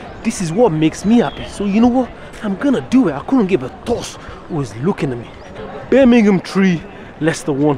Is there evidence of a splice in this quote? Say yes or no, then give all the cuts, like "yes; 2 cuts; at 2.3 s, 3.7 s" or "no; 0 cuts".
yes; 1 cut; at 5.6 s